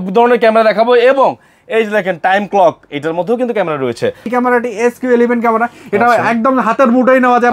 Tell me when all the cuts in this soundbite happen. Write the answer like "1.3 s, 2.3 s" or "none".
4.3 s